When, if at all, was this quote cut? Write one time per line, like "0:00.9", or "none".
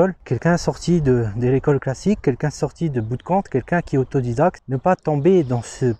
0:04.7